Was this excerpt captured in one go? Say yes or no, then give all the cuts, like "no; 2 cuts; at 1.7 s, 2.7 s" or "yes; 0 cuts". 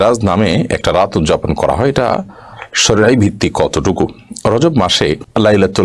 yes; 0 cuts